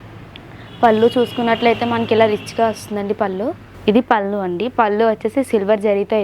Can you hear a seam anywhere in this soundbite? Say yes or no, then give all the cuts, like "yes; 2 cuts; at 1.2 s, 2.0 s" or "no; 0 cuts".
yes; 1 cut; at 3.7 s